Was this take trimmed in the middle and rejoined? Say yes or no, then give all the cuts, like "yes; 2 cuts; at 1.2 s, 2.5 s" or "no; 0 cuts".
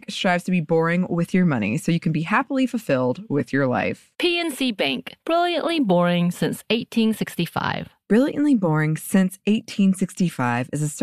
no; 0 cuts